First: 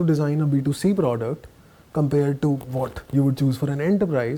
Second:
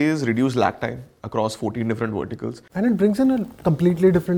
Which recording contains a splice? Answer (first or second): second